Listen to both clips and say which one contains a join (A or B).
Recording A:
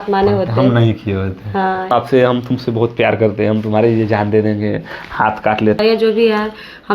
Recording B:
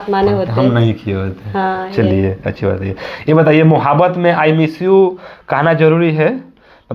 A